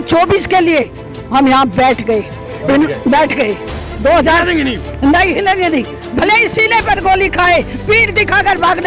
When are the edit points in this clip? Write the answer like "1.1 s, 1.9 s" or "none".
none